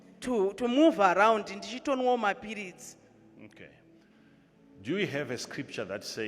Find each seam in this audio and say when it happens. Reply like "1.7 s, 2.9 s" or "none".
4.1 s